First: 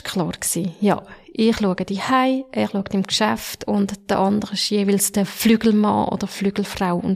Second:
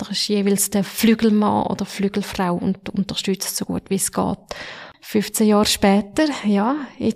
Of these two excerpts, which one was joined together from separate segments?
second; 1 cut; at 4.9 s

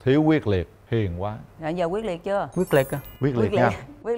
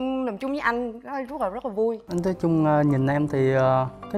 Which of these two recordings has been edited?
second; 1 cut; at 2.0 s

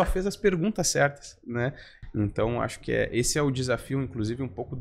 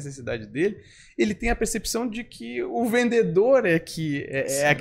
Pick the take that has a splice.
first; 1 cut; at 1.9 s

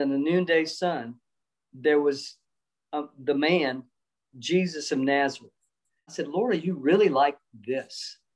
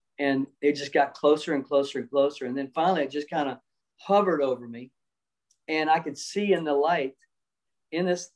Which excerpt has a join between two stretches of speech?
first; 1 cut; at 6.2 s

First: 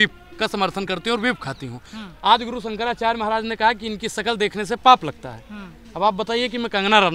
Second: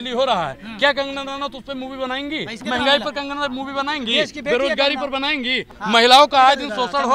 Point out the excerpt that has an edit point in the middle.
second; 2 cuts; at 2.6 s, 5.7 s

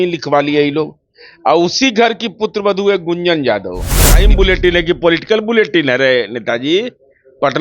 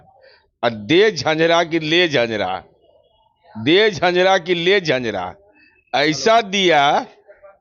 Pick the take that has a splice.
first; 1 cut; at 4.2 s

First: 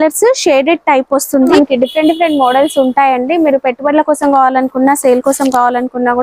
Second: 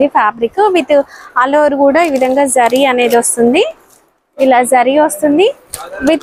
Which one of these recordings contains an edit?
first; 1 cut; at 1.5 s

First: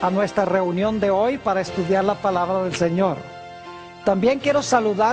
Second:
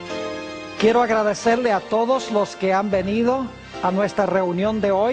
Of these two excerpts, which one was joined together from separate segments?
second; 1 cut; at 2.2 s

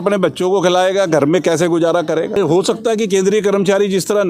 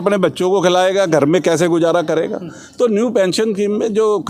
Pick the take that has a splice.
first; 1 cut; at 2.4 s

